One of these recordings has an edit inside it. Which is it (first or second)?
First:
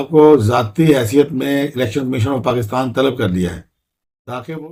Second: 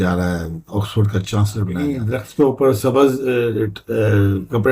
second